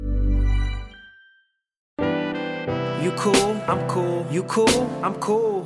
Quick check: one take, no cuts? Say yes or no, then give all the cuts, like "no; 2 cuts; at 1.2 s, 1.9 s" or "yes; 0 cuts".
no; 1 cut; at 1.9 s